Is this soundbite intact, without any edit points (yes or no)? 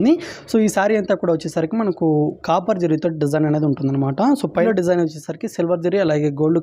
no